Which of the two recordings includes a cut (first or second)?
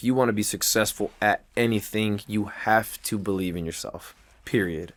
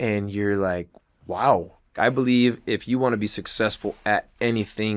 second